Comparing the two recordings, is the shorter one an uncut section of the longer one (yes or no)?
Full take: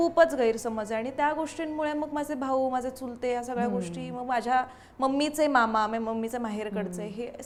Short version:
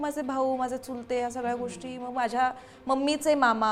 yes